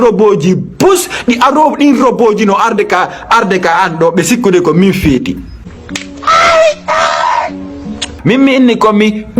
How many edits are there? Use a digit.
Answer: 1